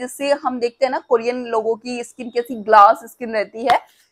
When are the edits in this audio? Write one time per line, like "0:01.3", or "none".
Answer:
none